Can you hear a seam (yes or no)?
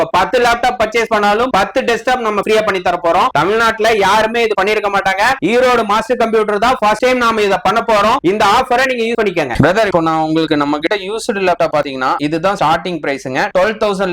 no